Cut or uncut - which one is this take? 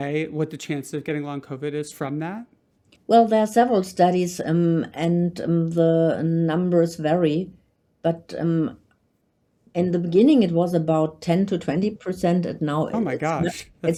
uncut